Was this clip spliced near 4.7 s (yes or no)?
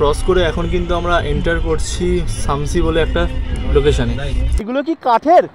yes